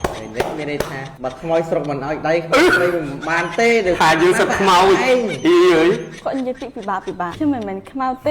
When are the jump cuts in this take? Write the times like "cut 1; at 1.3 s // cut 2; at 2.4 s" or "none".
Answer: cut 1; at 7.3 s